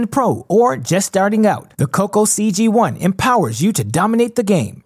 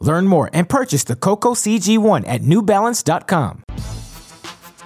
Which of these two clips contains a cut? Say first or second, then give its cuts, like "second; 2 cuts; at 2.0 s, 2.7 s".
second; 1 cut; at 3.7 s